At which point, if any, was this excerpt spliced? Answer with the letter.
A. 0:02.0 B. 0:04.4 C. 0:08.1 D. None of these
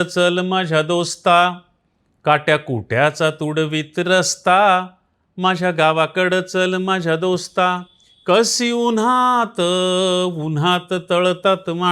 D